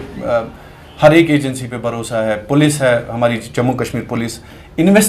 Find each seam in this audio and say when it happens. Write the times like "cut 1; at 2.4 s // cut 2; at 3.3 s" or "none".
none